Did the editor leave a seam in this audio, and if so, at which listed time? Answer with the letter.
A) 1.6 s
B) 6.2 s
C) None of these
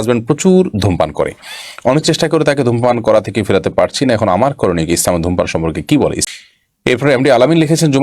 B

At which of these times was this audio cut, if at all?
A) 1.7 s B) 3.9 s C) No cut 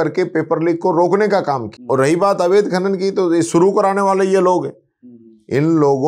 A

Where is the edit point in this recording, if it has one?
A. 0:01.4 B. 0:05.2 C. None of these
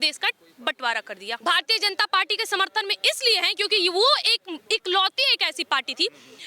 A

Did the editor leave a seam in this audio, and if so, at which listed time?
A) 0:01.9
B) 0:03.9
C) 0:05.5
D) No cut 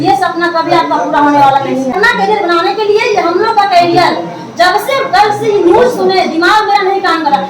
A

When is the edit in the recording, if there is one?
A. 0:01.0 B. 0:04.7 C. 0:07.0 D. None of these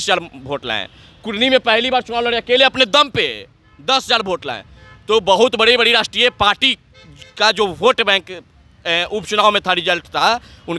D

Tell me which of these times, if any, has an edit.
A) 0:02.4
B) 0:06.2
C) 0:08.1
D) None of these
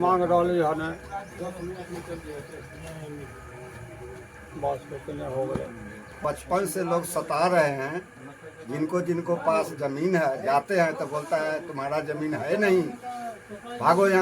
B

